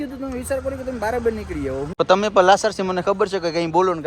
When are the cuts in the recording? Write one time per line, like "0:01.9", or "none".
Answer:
0:01.8